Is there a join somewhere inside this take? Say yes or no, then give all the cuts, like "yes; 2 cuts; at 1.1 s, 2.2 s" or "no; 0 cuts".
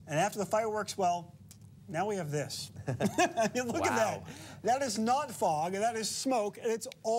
no; 0 cuts